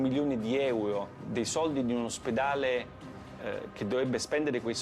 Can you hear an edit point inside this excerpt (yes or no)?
yes